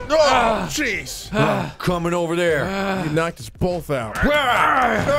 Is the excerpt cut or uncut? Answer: cut